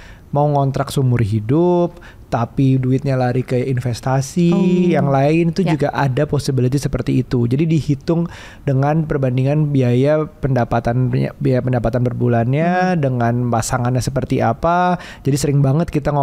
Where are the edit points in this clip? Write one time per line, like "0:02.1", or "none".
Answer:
none